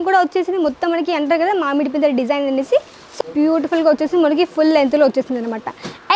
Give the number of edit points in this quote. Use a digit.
1